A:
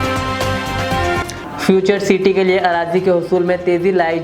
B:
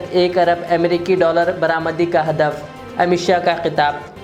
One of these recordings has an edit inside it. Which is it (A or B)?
A